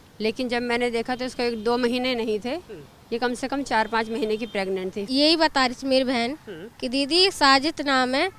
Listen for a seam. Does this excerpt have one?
yes; 1 cut; at 5.1 s

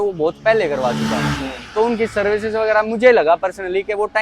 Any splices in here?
no; 0 cuts

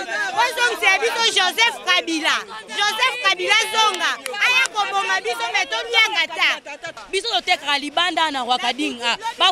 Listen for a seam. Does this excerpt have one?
yes; 1 cut; at 6.9 s

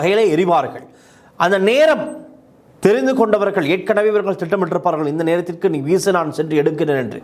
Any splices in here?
no; 0 cuts

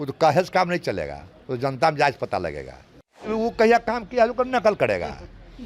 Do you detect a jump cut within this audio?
yes; 1 cut; at 3.3 s

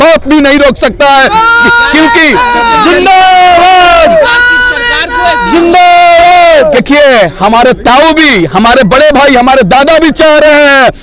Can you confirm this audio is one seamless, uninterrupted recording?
yes; 0 cuts

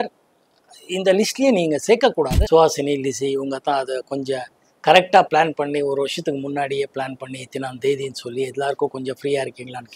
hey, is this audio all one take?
no; 1 cut; at 2.4 s

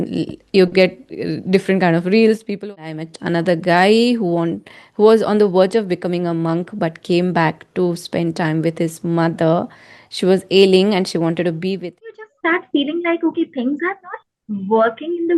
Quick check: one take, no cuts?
no; 2 cuts; at 2.7 s, 12.1 s

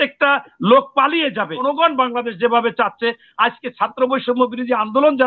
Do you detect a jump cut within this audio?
yes; 1 cut; at 1.6 s

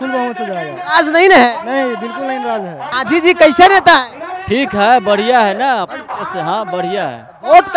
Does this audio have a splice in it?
yes; 1 cut; at 2.9 s

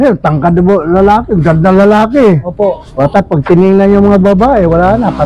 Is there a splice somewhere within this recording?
no; 0 cuts

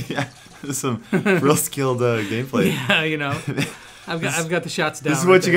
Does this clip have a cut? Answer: no; 0 cuts

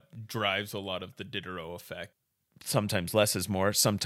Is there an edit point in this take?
yes; 1 cut; at 2.6 s

